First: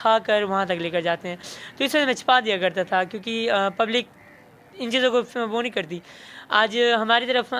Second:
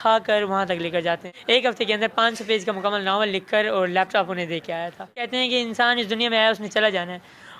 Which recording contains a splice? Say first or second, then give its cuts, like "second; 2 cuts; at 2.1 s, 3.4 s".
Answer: second; 2 cuts; at 1.3 s, 5.3 s